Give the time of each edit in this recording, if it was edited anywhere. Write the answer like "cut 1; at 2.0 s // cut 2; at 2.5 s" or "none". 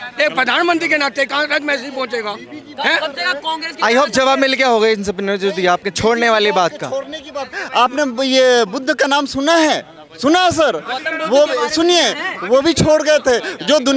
none